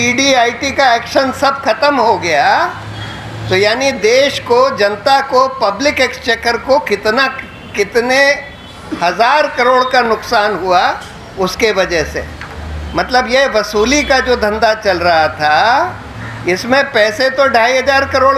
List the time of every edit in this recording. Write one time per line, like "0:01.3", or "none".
none